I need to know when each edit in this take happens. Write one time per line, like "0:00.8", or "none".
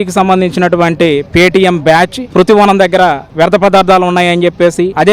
0:02.2